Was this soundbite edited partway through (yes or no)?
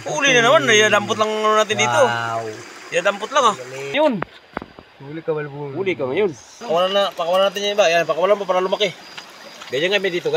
yes